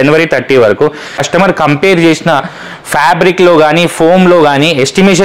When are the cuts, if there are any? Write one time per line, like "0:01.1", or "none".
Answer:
0:01.2